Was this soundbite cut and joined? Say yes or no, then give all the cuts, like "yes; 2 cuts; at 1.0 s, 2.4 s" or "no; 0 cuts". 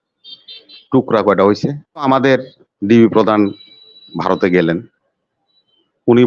yes; 1 cut; at 2.0 s